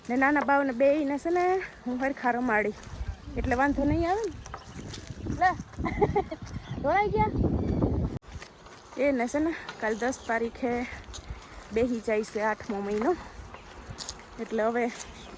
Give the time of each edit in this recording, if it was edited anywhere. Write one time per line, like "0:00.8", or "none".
0:08.3